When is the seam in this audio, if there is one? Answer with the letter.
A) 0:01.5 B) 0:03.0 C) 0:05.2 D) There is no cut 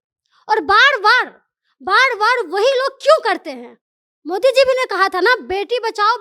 D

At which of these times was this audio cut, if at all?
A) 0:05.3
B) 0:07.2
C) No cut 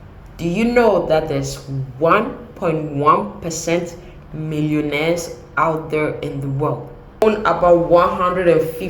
B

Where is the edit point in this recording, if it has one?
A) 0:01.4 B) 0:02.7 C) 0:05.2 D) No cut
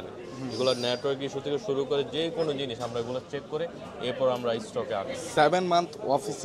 C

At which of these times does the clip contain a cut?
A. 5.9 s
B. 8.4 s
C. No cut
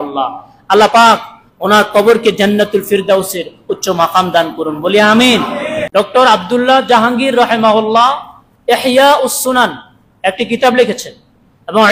A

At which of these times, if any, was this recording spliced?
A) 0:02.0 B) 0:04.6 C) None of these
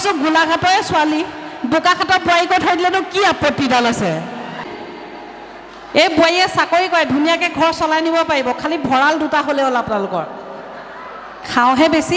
B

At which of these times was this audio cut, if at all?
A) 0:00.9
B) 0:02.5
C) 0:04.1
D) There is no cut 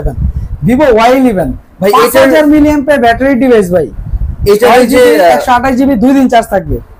D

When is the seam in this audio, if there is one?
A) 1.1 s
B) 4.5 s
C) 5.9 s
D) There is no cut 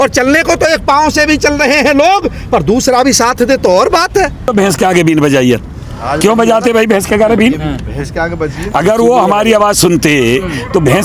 B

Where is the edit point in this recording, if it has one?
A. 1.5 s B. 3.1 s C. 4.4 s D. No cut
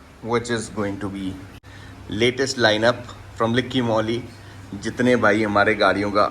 A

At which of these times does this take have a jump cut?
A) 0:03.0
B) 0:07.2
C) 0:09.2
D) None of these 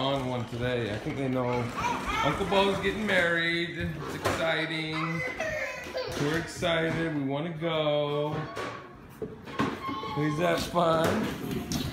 D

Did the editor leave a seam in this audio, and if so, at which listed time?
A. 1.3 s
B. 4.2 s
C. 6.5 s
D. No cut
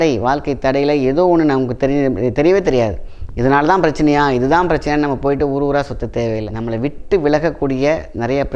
C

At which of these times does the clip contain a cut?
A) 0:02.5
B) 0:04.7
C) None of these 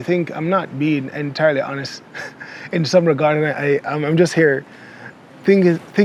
C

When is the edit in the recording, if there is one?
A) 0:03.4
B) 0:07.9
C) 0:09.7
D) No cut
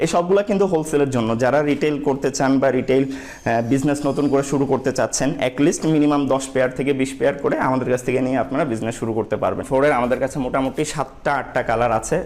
C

